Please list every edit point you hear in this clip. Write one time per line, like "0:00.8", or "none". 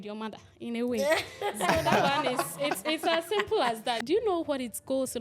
0:04.0